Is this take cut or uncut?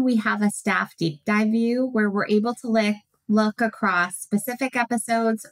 uncut